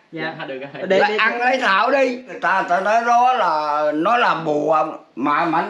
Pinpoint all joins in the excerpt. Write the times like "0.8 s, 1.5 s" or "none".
2.3 s